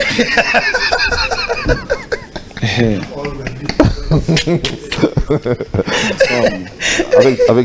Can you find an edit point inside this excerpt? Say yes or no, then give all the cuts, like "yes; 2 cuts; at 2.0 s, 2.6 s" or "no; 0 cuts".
no; 0 cuts